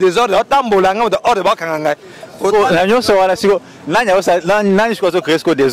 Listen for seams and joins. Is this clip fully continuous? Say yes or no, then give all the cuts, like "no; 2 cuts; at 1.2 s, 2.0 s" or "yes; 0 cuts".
yes; 0 cuts